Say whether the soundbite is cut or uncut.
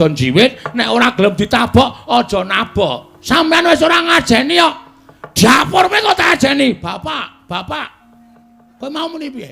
cut